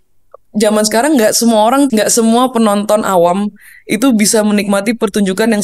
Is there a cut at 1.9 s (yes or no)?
yes